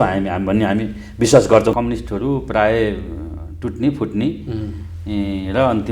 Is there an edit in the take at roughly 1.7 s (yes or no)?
yes